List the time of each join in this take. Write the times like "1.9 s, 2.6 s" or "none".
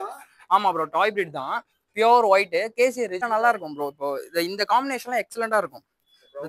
3.2 s